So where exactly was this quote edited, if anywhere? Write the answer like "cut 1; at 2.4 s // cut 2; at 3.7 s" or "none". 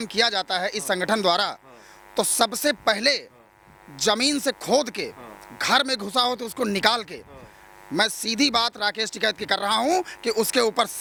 none